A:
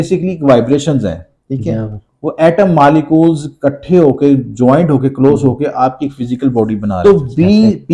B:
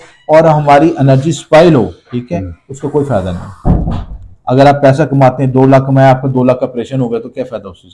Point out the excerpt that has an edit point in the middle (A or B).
A